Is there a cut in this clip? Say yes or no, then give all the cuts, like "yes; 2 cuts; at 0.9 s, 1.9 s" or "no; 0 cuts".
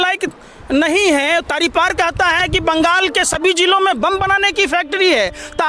no; 0 cuts